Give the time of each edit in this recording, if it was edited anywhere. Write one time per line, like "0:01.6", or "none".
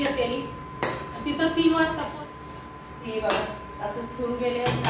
0:02.0